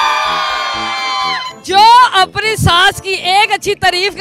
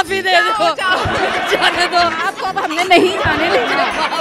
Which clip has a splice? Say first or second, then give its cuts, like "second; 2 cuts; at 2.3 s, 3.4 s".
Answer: first; 1 cut; at 1.5 s